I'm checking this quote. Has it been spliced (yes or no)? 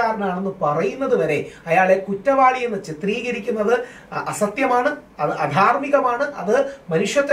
no